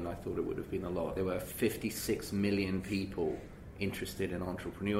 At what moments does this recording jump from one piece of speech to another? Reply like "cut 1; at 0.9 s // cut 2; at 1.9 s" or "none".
cut 1; at 1.1 s